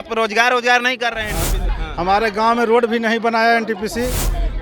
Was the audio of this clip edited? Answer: yes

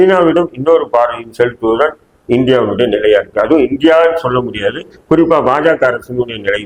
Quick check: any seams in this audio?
no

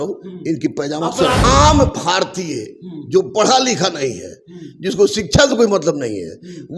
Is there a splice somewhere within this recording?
yes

